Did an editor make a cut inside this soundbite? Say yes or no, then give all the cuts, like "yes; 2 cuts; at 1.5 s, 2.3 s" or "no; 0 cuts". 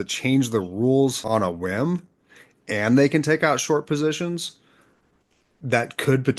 yes; 1 cut; at 1.2 s